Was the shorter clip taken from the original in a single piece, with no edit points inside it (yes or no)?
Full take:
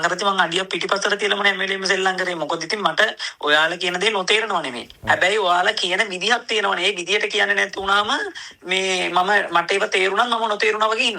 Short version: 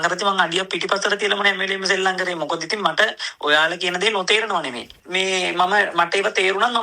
no